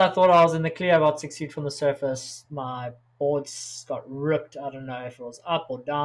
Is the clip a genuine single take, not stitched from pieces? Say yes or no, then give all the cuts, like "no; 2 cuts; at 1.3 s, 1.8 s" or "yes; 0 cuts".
yes; 0 cuts